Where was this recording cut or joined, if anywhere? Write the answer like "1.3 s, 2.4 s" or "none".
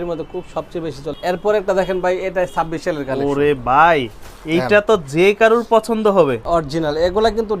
1.1 s, 6.4 s